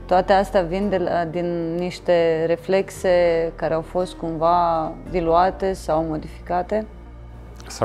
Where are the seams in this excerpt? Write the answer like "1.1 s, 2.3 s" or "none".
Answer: none